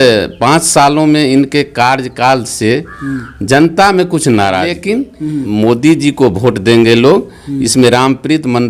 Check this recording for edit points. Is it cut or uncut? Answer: cut